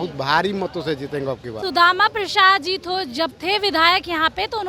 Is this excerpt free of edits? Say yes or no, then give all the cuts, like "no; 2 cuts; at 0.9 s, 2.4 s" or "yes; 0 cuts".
no; 1 cut; at 1.6 s